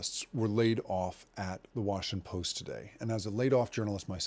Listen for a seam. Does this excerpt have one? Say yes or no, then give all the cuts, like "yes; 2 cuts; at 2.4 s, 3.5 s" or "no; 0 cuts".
no; 0 cuts